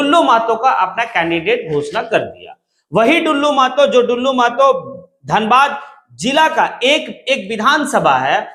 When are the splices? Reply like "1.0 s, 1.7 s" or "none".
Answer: none